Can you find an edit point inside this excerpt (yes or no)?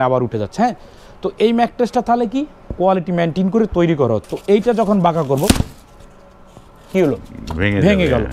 yes